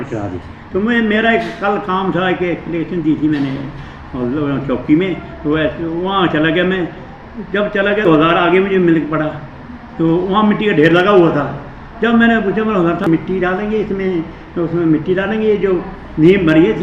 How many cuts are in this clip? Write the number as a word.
two